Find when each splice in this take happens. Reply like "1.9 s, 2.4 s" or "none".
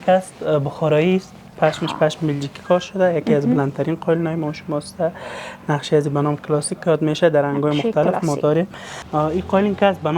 9.0 s